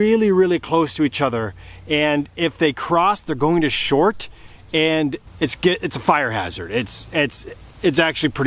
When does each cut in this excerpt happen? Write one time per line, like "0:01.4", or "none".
0:05.2